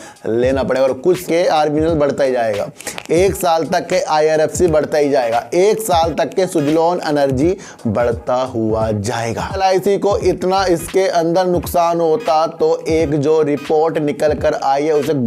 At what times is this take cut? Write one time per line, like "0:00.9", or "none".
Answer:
0:01.2
0:09.6